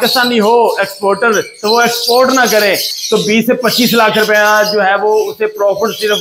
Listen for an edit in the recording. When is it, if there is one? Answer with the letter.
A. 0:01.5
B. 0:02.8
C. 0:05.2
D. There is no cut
B